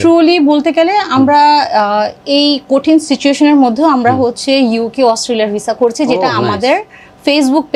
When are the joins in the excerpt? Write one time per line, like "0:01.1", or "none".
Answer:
none